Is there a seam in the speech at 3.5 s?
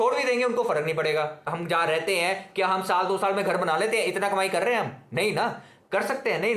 no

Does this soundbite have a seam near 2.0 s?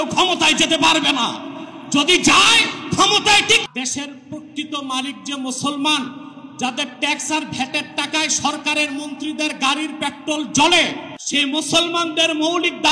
no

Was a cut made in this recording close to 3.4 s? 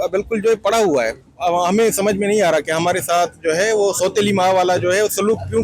no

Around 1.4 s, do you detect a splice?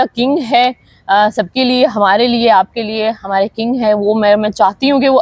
no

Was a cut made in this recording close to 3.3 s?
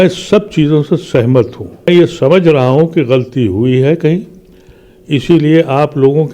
no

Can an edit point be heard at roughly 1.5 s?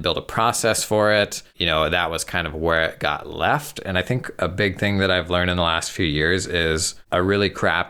yes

